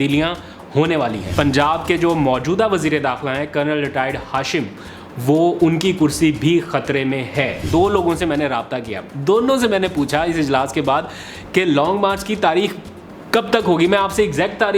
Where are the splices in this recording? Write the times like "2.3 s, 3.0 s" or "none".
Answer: 1.2 s, 7.6 s